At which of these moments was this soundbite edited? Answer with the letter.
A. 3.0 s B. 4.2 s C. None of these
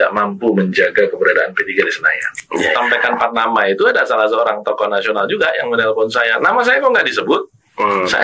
A